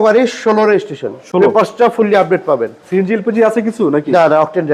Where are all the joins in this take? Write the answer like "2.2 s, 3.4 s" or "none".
none